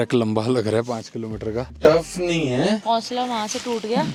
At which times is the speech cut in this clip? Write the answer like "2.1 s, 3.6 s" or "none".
none

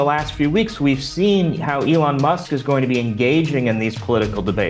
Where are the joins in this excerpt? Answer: none

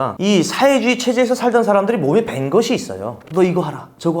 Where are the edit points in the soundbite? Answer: 3.2 s

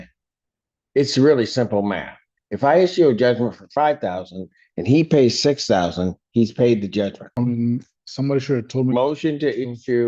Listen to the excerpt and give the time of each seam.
7.2 s

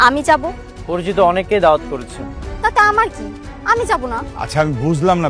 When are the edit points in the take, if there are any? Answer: 4.3 s

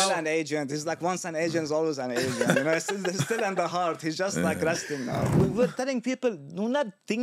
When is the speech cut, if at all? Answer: 5.3 s

